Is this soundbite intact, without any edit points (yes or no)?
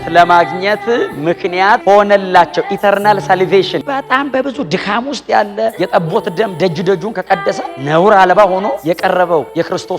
no